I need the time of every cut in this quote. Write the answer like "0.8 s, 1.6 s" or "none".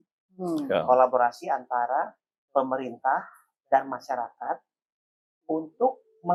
none